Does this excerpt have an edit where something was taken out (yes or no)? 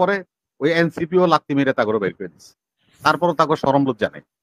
no